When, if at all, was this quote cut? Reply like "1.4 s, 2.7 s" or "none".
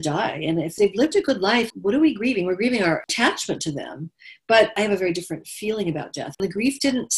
0.7 s, 1.7 s, 3.1 s, 4.8 s, 6.4 s